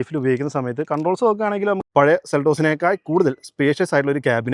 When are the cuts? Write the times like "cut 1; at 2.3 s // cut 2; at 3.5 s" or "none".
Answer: cut 1; at 1.9 s